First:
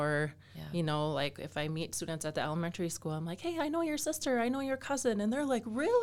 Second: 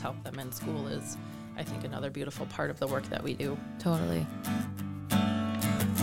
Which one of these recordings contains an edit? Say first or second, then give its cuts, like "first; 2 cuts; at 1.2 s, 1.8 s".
second; 1 cut; at 4.4 s